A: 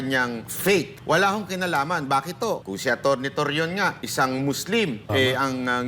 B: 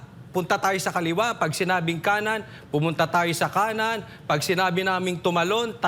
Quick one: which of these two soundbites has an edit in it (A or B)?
A